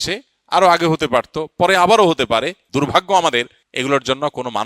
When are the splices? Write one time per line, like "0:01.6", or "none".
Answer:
0:02.6
0:03.6